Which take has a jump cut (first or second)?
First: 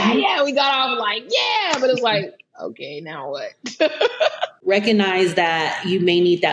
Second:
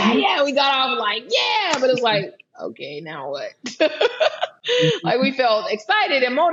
first